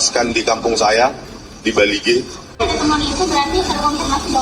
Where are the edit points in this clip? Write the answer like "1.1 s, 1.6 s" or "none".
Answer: 2.6 s

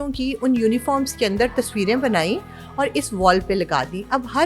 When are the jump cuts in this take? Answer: none

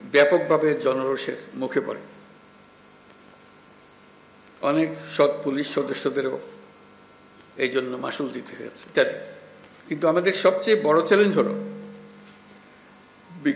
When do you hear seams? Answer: 8.9 s

